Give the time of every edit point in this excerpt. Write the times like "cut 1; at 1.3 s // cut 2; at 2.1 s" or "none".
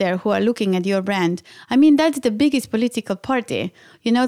none